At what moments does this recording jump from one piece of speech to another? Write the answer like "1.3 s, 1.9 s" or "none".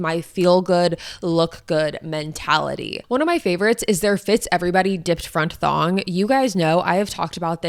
none